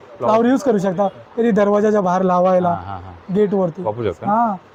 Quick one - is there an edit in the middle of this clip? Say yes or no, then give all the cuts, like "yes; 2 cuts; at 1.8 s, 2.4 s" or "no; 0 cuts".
no; 0 cuts